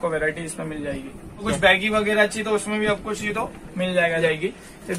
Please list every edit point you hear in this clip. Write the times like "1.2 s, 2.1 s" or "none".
1.5 s, 4.2 s